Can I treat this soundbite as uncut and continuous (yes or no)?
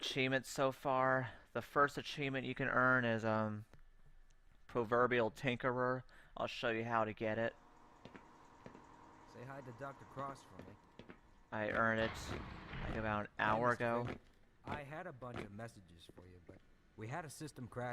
no